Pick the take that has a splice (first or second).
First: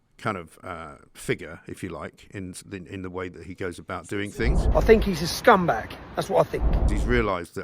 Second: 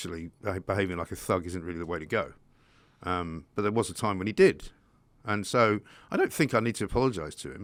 first